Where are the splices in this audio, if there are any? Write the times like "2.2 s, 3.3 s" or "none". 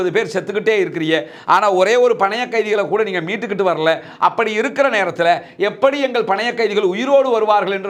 none